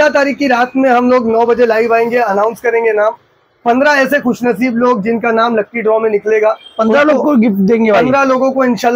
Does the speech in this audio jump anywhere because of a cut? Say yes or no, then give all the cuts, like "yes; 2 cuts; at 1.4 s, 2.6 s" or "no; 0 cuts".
no; 0 cuts